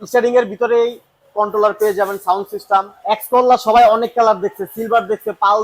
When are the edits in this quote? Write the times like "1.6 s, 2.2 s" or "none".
2.9 s